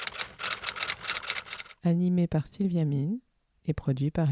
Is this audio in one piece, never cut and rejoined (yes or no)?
yes